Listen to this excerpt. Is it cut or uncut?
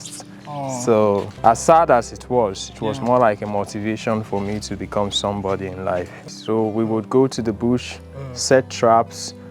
cut